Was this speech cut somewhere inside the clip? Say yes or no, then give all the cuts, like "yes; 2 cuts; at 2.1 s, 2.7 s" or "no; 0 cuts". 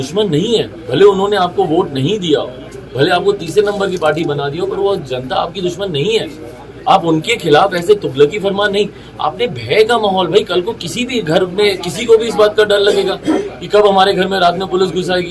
no; 0 cuts